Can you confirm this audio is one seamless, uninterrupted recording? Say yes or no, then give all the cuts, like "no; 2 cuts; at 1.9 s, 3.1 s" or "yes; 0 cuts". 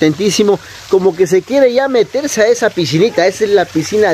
yes; 0 cuts